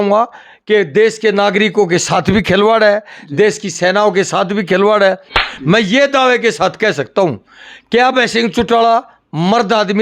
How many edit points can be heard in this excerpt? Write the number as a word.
one